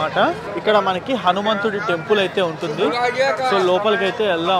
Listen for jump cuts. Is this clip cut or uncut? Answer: uncut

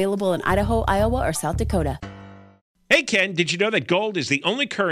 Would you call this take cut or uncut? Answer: cut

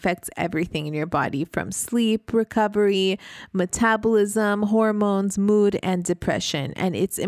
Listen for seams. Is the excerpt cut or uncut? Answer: uncut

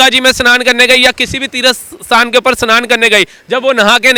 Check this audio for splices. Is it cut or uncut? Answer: uncut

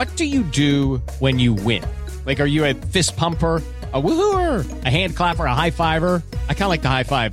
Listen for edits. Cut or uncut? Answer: uncut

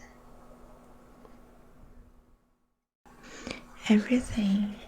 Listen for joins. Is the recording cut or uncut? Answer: cut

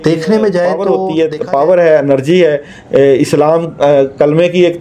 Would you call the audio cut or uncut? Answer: cut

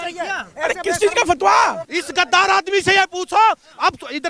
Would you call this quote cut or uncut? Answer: cut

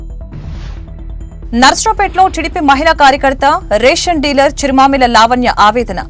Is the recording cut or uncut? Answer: uncut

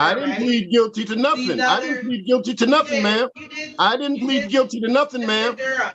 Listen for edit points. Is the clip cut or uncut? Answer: uncut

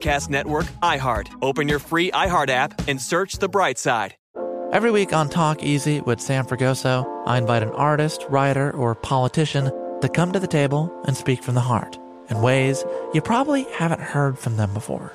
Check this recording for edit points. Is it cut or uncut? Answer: cut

